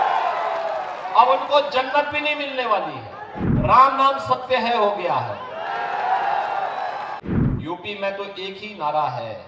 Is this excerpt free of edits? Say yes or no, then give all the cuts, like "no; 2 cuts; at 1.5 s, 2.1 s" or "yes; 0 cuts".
no; 2 cuts; at 3.4 s, 7.2 s